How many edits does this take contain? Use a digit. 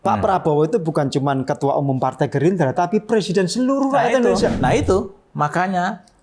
1